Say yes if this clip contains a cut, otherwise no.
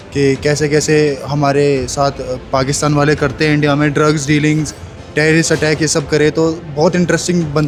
no